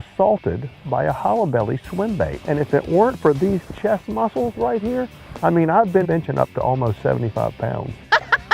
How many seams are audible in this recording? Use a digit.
1